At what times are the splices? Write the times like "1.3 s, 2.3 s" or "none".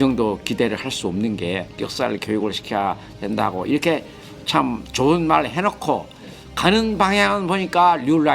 1.7 s